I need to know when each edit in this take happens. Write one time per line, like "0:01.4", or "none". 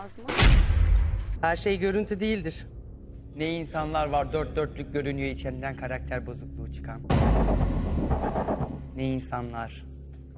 0:01.2